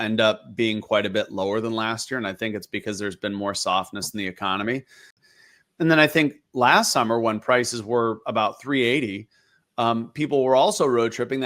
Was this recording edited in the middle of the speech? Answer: yes; 1 cut; at 5.2 s

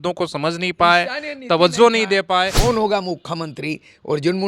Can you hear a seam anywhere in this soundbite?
yes; 1 cut; at 2.5 s

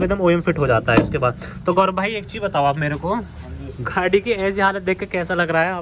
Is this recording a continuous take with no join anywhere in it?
yes; 0 cuts

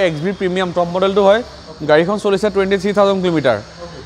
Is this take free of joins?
yes; 0 cuts

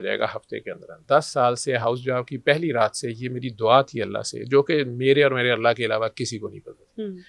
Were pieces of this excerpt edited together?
yes; 1 cut; at 1.0 s

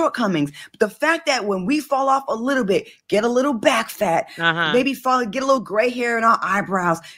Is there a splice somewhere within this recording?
no; 0 cuts

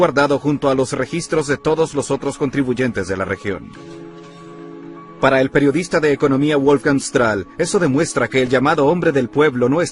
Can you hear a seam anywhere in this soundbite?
no; 0 cuts

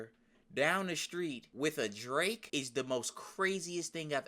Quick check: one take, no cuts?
no; 2 cuts; at 1.5 s, 2.4 s

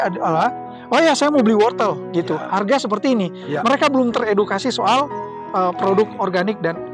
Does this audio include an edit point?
no; 0 cuts

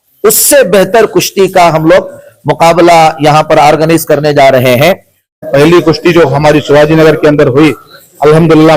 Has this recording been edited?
yes; 1 cut; at 5.4 s

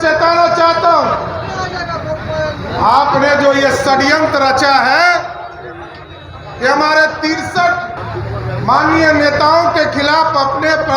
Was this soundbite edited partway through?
yes; 1 cut; at 8.0 s

